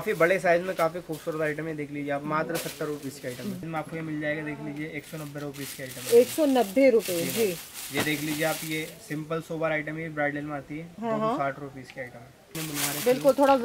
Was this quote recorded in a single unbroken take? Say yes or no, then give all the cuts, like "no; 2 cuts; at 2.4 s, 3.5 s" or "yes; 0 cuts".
no; 2 cuts; at 3.6 s, 12.5 s